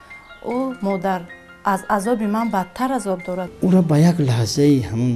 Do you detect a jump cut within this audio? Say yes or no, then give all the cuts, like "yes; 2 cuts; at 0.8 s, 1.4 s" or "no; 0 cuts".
yes; 1 cut; at 3.4 s